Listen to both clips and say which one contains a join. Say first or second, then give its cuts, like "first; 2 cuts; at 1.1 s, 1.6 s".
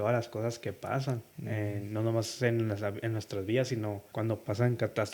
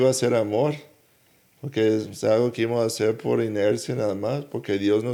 first; 2 cuts; at 1.3 s, 4.0 s